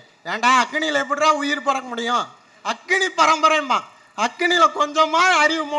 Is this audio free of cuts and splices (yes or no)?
yes